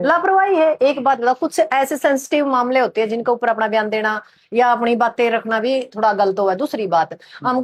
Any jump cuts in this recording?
no; 0 cuts

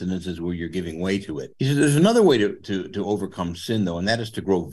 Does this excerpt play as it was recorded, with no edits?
no; 1 cut; at 1.5 s

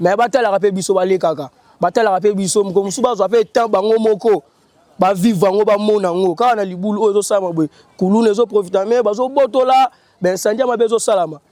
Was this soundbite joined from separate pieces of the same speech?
no; 0 cuts

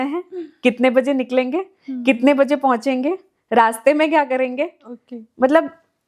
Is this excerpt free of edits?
yes; 0 cuts

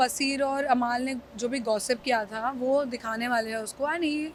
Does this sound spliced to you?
no; 0 cuts

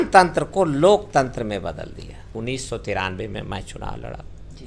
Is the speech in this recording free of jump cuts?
no; 1 cut; at 2.3 s

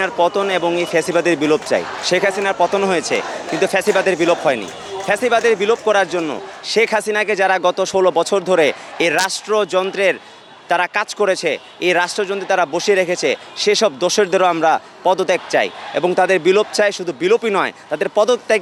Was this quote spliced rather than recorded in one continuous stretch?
no; 0 cuts

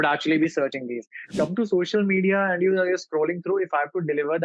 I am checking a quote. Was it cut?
yes; 1 cut; at 1.3 s

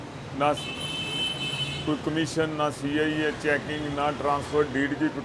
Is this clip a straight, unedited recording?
yes; 0 cuts

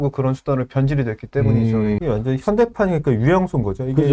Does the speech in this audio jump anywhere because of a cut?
yes; 1 cut; at 2.0 s

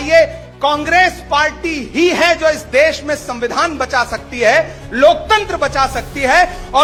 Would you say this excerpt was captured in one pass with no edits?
yes; 0 cuts

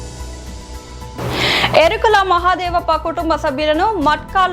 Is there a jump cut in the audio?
yes; 1 cut; at 1.1 s

